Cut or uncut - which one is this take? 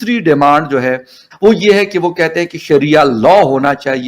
cut